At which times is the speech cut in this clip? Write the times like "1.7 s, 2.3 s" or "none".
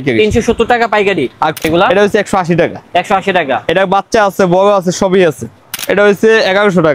1.6 s, 5.8 s